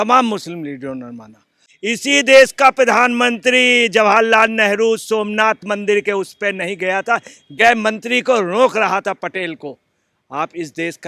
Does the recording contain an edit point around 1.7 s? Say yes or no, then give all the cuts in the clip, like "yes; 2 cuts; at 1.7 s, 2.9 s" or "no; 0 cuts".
yes; 1 cut; at 1.7 s